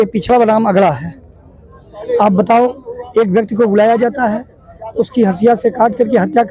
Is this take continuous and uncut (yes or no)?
yes